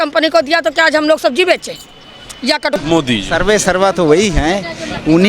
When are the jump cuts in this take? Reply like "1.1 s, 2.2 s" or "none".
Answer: 2.8 s